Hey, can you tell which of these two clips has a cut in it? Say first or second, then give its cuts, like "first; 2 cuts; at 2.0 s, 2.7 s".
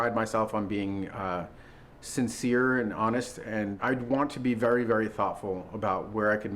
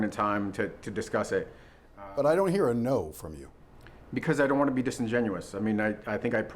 first; 1 cut; at 3.7 s